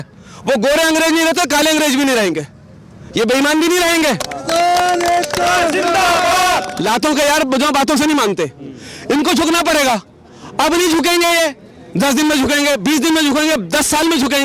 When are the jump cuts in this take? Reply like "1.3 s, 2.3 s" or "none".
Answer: 6.7 s